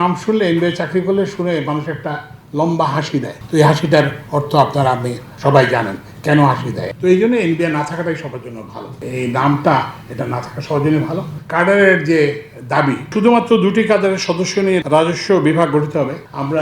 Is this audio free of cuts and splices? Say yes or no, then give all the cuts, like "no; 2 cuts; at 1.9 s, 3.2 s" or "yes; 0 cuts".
no; 2 cuts; at 11.3 s, 14.8 s